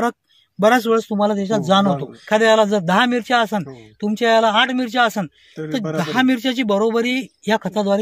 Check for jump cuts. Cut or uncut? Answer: cut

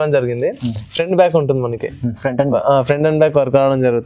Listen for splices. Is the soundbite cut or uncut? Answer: uncut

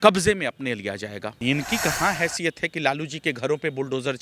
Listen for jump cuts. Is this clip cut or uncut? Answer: cut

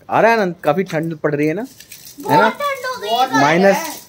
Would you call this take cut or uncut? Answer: uncut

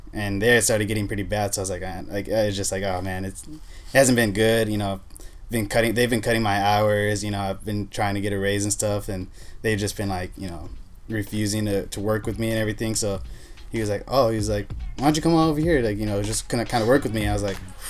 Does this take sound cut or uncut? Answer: uncut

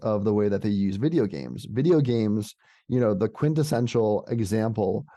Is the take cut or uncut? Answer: uncut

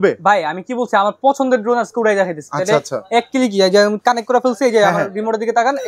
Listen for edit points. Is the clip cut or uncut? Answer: uncut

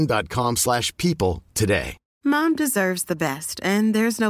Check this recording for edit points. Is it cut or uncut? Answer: cut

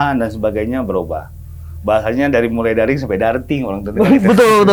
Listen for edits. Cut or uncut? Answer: uncut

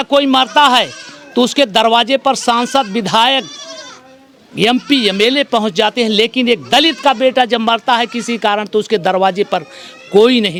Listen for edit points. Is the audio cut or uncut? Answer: uncut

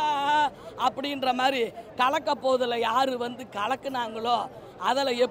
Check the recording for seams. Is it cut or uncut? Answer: uncut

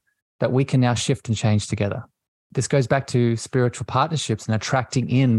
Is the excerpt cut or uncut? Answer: cut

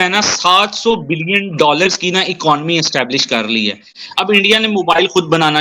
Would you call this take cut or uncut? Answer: cut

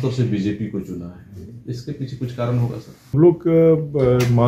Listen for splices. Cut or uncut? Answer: cut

